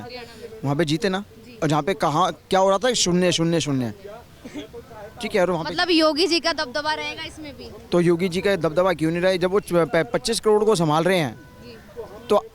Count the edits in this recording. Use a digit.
0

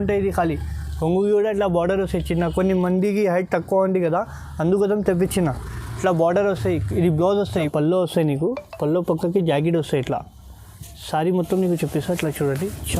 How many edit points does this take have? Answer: 1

